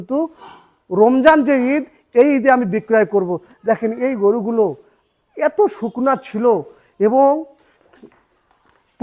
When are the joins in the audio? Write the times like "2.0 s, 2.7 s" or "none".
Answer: none